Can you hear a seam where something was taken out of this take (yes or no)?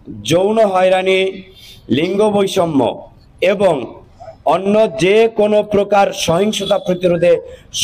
no